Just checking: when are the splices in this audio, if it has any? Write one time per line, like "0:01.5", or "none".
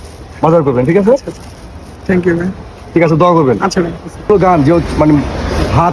0:04.3